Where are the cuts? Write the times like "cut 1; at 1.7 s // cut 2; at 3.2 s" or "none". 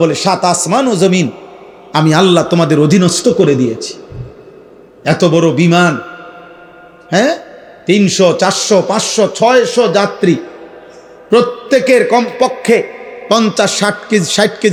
none